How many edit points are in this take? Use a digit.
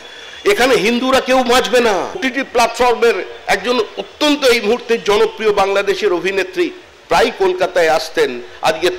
1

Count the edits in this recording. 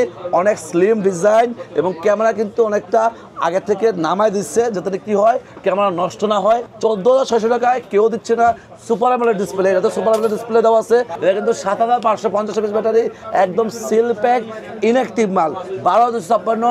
2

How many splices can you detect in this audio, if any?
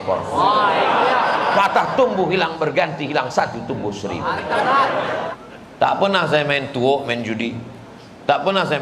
1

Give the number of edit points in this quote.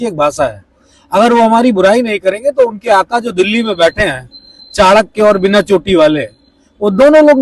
0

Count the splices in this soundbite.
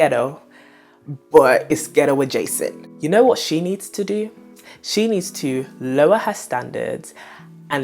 1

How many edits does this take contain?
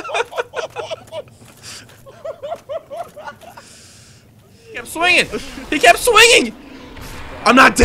1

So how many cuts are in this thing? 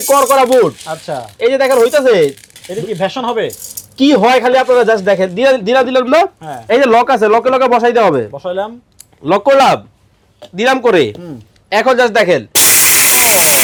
0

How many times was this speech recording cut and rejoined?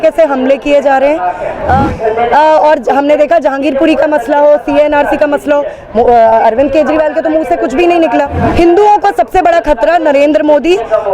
2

